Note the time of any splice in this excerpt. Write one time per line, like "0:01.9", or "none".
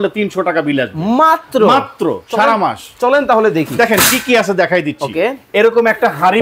none